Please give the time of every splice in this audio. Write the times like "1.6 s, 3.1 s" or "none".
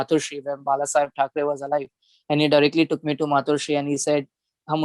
none